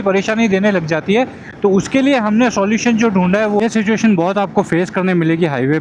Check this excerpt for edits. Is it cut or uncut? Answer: cut